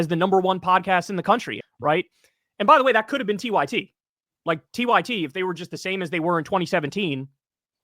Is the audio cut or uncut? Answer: cut